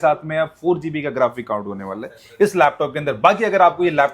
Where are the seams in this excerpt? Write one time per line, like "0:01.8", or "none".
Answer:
none